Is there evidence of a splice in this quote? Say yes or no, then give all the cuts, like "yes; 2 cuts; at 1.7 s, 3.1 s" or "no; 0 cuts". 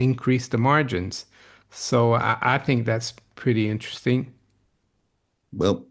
no; 0 cuts